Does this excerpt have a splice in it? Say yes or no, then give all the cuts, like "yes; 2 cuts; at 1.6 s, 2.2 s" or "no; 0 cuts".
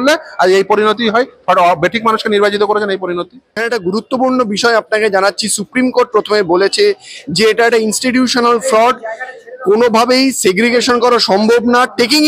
yes; 1 cut; at 3.6 s